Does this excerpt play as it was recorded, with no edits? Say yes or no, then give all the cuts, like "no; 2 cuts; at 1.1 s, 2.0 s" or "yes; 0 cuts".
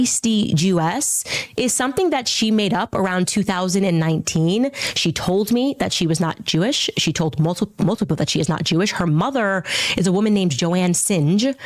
yes; 0 cuts